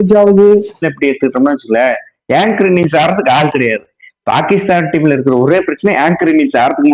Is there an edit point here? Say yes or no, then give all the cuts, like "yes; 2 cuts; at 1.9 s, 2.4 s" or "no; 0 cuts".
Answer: yes; 1 cut; at 0.9 s